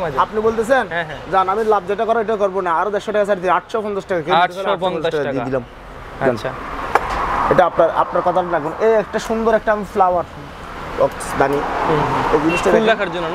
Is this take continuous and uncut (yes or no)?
yes